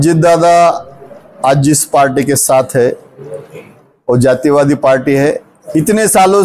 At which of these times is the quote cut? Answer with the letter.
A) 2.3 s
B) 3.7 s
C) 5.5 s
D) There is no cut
C